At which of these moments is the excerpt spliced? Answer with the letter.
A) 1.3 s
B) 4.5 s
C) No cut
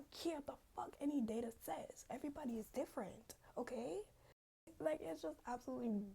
B